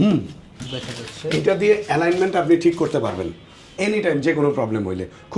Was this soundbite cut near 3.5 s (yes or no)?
no